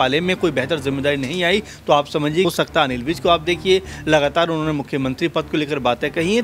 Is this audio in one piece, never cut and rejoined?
no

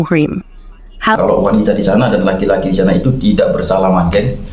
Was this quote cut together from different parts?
yes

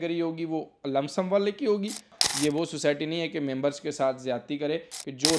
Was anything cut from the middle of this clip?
yes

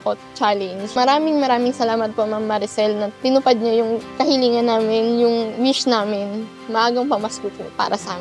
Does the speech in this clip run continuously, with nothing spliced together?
no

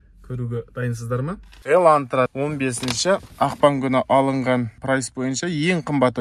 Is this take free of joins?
no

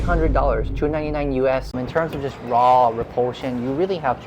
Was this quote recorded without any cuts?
no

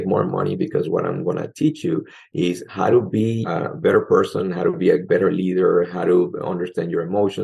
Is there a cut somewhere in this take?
yes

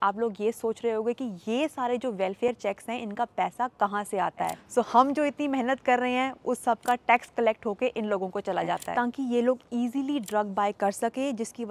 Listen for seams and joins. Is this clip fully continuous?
no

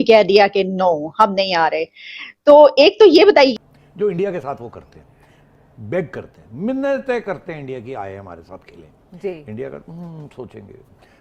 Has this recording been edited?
yes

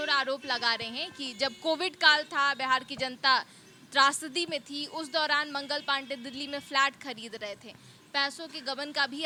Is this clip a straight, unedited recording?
yes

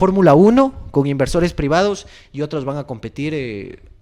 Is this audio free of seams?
yes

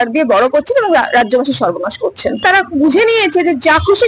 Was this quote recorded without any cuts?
no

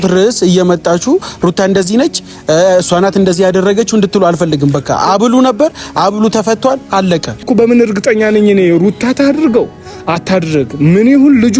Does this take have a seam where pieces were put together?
yes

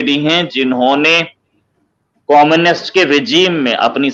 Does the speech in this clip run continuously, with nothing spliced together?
yes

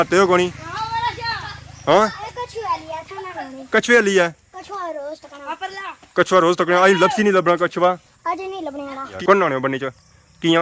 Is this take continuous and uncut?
no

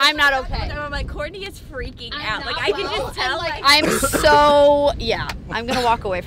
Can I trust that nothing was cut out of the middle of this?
yes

